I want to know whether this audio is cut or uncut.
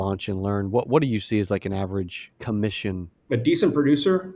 cut